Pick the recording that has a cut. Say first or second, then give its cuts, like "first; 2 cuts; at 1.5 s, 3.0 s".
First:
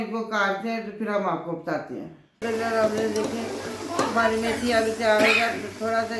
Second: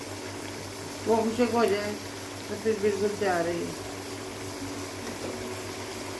first; 1 cut; at 2.2 s